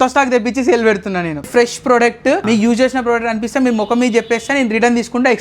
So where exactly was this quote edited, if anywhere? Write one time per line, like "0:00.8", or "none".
0:01.5
0:02.4